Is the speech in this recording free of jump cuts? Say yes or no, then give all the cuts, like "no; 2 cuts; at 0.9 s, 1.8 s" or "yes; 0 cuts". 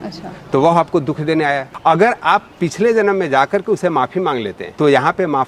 no; 2 cuts; at 1.7 s, 4.6 s